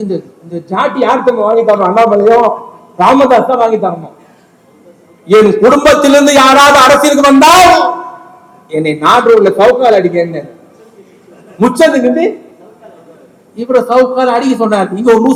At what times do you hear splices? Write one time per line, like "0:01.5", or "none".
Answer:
none